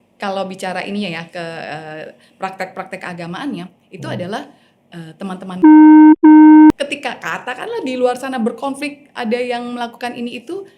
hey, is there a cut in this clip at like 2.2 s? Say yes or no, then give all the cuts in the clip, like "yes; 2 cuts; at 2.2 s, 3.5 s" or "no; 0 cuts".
no; 1 cut; at 6.8 s